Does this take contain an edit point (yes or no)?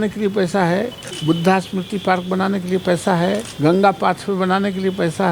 yes